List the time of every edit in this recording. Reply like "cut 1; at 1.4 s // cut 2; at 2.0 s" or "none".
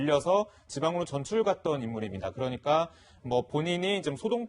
cut 1; at 2.1 s